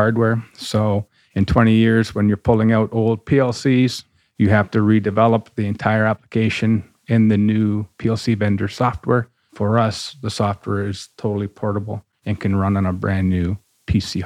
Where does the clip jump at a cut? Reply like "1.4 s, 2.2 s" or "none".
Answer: 7.9 s, 9.4 s